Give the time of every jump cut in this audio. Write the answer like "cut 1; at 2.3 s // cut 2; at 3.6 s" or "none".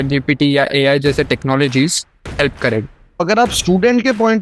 cut 1; at 3.2 s